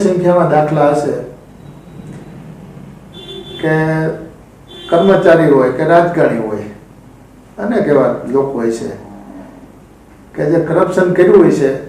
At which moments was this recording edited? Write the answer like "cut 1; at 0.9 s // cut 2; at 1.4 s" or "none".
none